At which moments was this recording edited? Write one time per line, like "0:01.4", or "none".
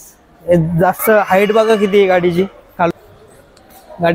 0:02.9